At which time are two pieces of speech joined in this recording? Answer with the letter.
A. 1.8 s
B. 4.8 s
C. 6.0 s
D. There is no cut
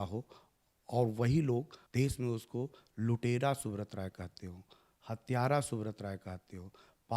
A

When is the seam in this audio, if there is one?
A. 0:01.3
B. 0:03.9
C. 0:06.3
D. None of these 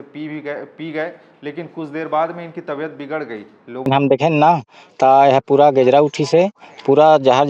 B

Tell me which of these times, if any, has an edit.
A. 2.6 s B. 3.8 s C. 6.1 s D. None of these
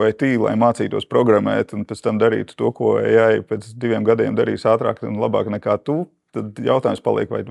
D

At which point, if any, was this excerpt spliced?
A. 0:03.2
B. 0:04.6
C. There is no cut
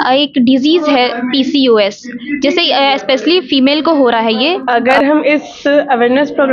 B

